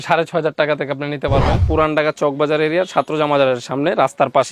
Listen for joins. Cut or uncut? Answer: cut